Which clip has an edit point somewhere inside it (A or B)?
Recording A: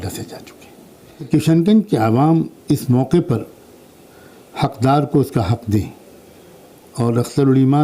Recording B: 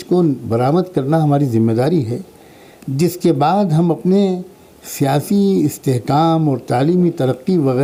A